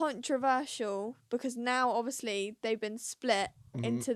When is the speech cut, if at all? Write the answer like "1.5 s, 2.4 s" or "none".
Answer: none